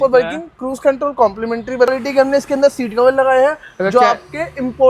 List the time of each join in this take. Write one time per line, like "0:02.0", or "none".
0:01.9